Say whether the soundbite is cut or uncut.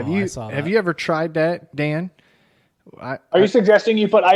uncut